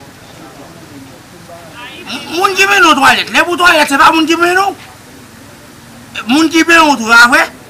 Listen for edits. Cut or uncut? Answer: uncut